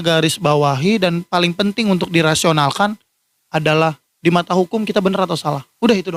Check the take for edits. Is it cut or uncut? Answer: uncut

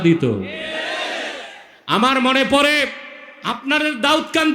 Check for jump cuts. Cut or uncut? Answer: uncut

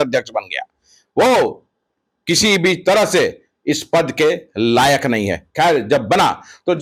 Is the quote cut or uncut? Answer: uncut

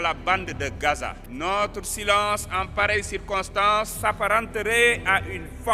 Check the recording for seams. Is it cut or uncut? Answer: cut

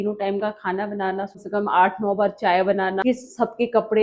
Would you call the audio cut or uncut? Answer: cut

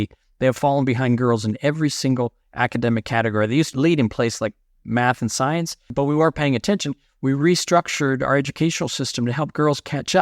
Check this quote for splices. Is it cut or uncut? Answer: cut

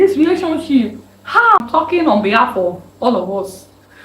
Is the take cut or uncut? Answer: cut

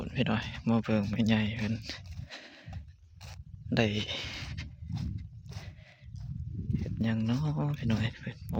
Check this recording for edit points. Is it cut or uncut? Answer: uncut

